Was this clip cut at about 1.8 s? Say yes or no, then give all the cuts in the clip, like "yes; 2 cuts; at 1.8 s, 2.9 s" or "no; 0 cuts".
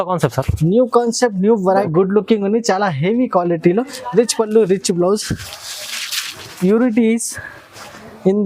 yes; 1 cut; at 1.8 s